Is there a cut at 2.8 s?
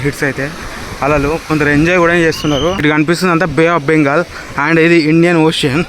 yes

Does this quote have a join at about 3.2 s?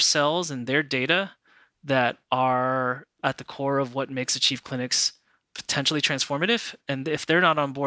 no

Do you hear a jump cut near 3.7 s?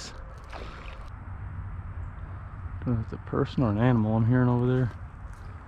no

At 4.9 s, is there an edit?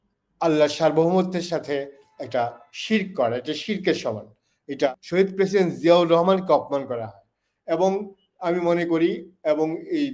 yes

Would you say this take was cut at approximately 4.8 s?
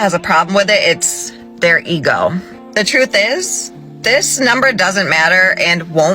no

